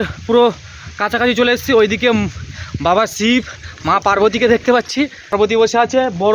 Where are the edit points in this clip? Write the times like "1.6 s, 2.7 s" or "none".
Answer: 5.3 s